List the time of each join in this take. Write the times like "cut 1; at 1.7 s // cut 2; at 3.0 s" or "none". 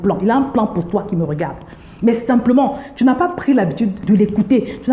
cut 1; at 4.0 s